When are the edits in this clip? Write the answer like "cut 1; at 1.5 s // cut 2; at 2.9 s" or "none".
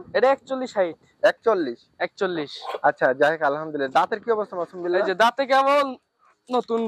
none